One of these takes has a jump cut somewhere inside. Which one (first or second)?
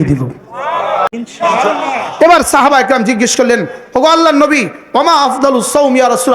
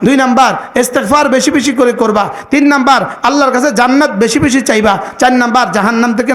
first